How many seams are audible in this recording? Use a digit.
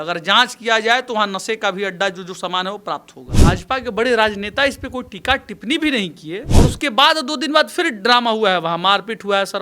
2